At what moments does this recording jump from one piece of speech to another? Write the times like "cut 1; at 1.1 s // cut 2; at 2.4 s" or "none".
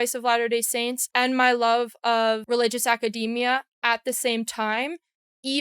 cut 1; at 1.0 s // cut 2; at 2.4 s